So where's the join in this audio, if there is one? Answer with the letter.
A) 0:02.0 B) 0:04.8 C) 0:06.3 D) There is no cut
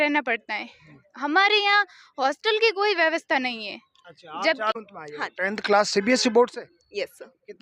B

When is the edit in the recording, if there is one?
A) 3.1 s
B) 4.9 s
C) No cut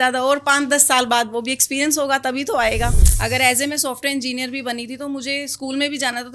A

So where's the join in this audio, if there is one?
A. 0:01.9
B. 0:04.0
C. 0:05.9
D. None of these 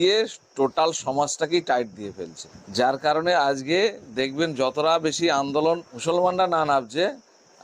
C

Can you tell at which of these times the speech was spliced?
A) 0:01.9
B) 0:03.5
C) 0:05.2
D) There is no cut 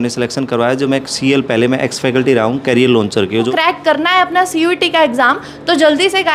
B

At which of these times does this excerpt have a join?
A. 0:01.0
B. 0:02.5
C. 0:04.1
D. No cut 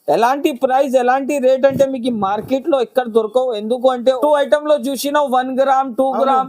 C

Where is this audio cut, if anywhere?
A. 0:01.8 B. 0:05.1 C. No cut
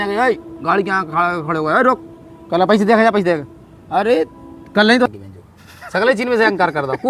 B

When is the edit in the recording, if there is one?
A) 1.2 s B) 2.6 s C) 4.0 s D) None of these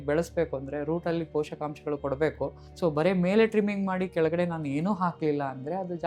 B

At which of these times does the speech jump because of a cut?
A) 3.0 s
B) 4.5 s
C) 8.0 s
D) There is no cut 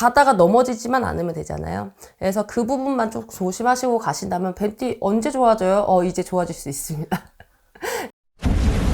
C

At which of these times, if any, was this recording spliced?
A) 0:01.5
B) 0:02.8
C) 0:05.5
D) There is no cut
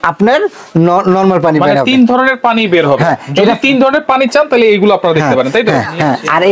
D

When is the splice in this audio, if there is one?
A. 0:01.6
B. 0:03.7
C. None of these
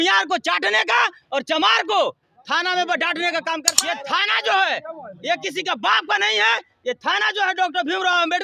B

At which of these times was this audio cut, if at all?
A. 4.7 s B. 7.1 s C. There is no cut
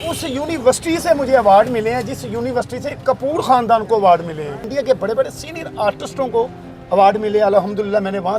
A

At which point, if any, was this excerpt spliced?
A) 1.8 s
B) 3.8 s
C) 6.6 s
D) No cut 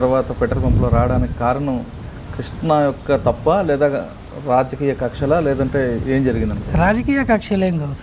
D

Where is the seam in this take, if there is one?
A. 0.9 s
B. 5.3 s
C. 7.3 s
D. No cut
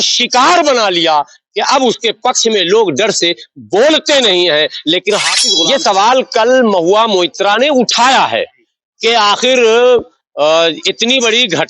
B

